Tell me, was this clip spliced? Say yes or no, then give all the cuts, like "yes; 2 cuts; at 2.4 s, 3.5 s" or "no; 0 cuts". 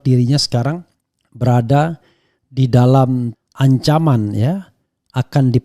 yes; 1 cut; at 3.4 s